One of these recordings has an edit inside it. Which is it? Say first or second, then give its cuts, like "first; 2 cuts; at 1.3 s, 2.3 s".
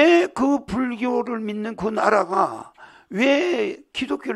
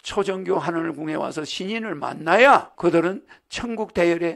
second; 1 cut; at 2.7 s